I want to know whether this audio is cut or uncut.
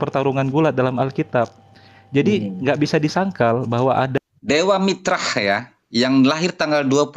cut